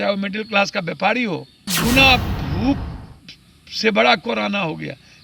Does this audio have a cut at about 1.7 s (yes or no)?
yes